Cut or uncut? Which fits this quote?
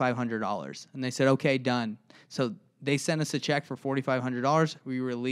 uncut